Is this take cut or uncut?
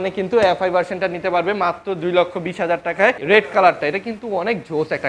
cut